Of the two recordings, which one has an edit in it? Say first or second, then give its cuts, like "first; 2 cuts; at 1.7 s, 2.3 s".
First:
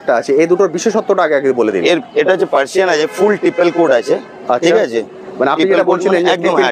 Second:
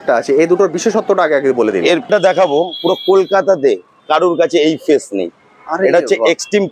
second; 1 cut; at 2.1 s